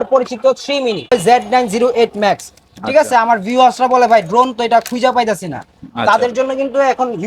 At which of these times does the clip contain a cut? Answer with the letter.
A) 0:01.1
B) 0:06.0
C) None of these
A